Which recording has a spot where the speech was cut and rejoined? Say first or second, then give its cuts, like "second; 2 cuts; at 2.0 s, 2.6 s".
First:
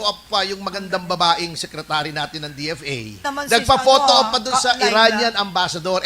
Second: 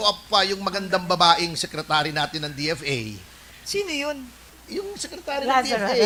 first; 1 cut; at 3.3 s